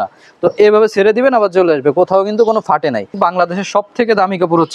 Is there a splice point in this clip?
yes; 1 cut; at 3.2 s

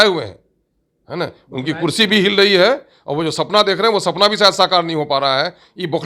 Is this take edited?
no; 0 cuts

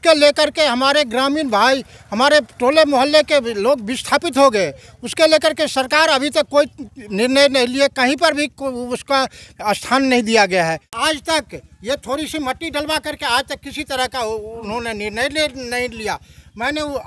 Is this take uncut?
no; 1 cut; at 10.9 s

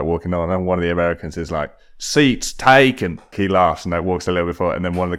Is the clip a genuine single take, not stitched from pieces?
no; 1 cut; at 3.3 s

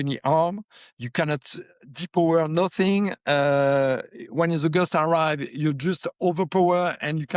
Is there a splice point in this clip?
no; 0 cuts

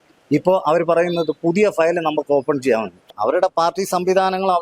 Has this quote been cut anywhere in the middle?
yes; 1 cut; at 3.1 s

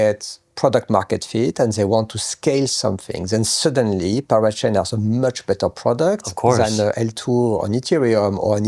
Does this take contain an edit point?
no; 0 cuts

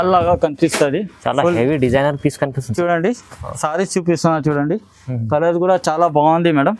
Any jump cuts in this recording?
yes; 1 cut; at 2.6 s

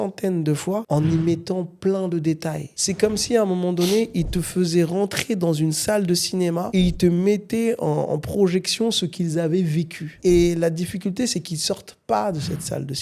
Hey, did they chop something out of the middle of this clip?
yes; 1 cut; at 2.7 s

